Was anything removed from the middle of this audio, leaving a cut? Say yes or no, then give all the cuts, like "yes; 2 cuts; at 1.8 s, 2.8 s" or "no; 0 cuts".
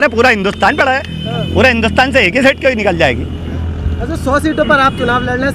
no; 0 cuts